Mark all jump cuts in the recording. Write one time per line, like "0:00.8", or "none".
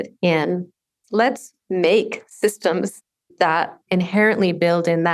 0:01.0
0:03.6